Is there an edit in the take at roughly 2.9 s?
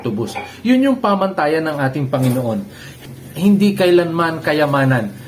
yes; 1 cut; at 2.9 s

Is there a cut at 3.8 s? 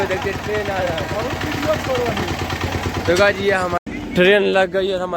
yes; 1 cut; at 3.8 s

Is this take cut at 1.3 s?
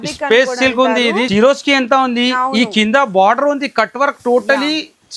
yes; 1 cut; at 1.3 s

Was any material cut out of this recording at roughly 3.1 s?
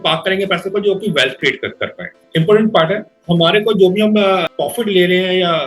yes; 2 cuts; at 2.2 s, 3.1 s

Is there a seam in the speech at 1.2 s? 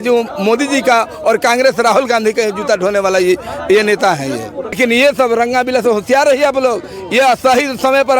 no; 1 cut; at 4.8 s

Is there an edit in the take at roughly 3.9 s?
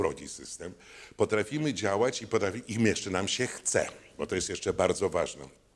no; 0 cuts

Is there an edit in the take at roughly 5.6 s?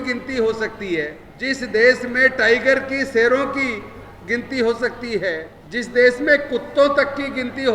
yes; 2 cuts; at 1.2 s, 5.6 s

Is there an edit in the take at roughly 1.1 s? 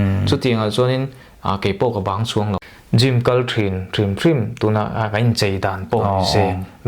no; 1 cut; at 2.6 s

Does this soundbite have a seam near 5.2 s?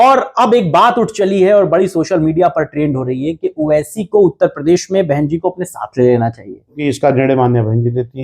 no; 1 cut; at 6.8 s

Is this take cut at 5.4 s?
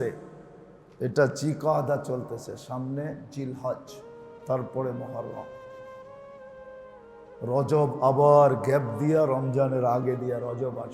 yes; 2 cuts; at 5.4 s, 7.4 s

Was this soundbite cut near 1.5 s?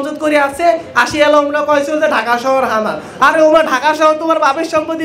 no; 0 cuts

